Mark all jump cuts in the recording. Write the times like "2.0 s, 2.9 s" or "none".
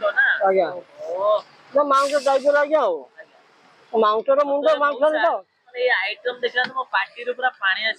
none